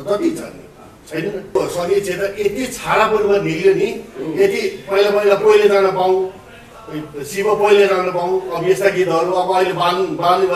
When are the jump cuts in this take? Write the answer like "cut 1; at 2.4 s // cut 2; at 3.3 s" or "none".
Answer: cut 1; at 1.5 s